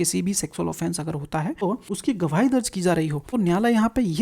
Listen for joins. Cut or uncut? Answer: cut